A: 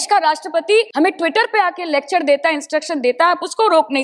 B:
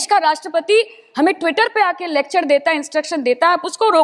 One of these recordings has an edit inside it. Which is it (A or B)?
A